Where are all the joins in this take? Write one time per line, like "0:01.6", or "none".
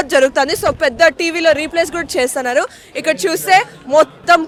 none